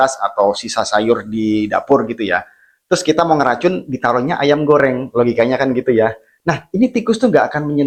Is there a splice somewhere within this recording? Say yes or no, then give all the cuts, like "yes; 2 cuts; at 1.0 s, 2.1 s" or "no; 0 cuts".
no; 0 cuts